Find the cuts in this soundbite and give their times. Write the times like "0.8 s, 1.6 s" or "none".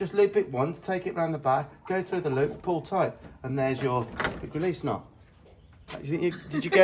none